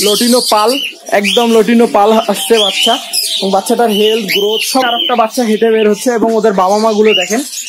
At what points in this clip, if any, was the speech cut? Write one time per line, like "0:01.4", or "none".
0:04.9